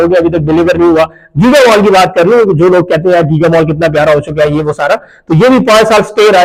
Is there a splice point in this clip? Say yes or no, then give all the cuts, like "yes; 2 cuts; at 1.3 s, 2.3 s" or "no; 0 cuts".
no; 0 cuts